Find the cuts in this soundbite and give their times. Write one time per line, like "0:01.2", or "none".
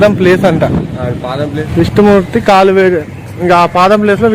0:01.6